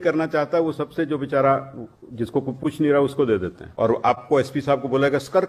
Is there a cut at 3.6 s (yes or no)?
yes